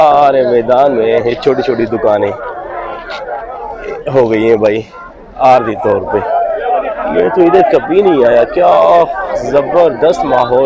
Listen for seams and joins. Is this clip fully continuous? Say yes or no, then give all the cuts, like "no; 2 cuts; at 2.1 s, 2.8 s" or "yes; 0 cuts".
yes; 0 cuts